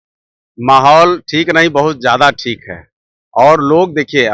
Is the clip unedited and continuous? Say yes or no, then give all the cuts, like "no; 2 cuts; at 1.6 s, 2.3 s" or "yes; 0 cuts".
yes; 0 cuts